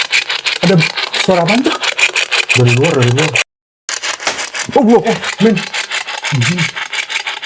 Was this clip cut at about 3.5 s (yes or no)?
yes